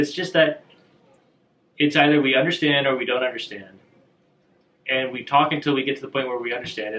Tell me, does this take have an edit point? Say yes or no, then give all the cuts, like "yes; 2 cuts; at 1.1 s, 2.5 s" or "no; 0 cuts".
no; 0 cuts